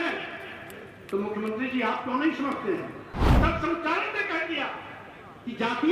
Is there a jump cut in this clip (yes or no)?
yes